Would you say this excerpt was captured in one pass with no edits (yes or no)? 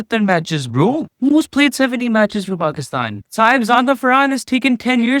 no